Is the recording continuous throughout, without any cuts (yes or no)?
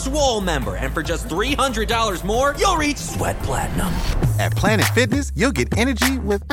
yes